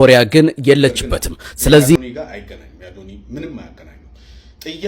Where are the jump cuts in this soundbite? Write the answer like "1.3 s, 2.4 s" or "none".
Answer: 2.0 s